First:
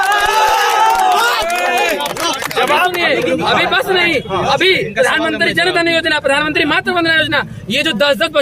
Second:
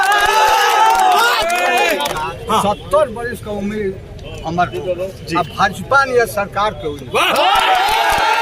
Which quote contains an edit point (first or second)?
second